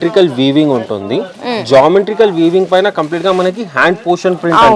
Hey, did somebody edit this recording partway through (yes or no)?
no